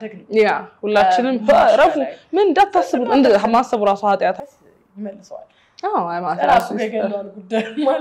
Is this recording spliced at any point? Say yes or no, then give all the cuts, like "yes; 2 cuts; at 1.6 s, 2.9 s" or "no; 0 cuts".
yes; 1 cut; at 4.5 s